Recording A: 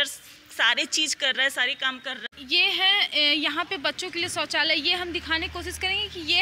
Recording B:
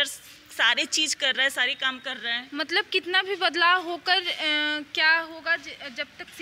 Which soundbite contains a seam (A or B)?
A